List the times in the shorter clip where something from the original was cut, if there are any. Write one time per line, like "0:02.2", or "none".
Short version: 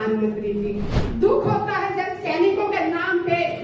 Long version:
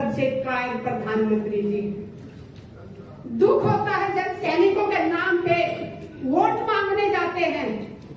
0:01.0